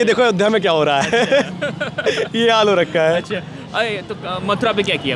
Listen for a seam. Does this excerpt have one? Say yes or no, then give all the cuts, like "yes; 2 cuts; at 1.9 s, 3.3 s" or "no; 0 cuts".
no; 0 cuts